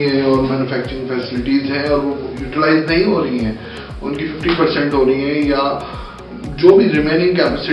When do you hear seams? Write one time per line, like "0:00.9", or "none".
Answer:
none